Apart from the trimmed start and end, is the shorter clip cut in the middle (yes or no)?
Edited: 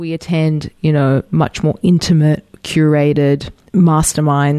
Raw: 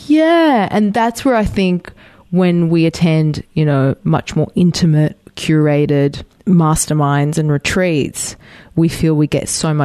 no